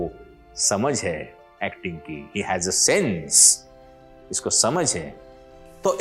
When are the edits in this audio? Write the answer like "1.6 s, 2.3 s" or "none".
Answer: none